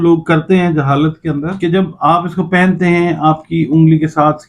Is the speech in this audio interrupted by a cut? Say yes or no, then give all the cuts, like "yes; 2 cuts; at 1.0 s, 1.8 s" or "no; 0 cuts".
yes; 1 cut; at 1.5 s